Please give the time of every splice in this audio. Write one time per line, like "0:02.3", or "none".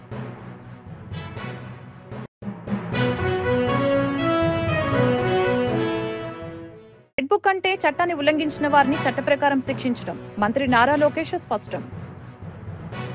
0:02.3